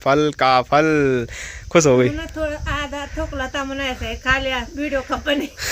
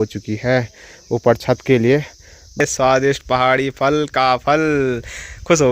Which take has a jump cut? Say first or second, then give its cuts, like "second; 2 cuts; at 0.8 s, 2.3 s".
second; 1 cut; at 2.6 s